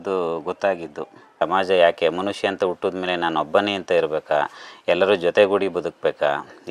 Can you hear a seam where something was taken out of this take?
yes; 1 cut; at 1.4 s

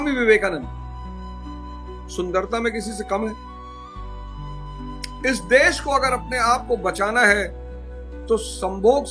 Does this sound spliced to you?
yes; 2 cuts; at 3.4 s, 5.2 s

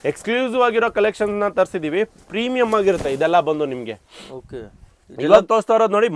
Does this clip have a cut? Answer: no; 0 cuts

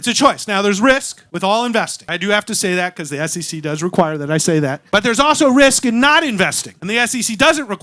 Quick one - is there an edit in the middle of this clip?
no; 0 cuts

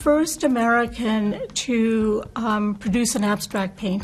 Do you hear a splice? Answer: no; 0 cuts

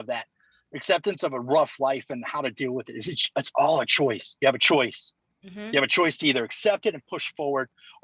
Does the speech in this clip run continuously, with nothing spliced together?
yes; 0 cuts

